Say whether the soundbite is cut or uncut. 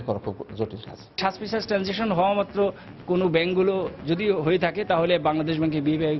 cut